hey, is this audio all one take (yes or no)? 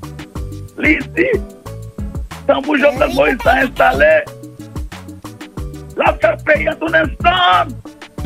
yes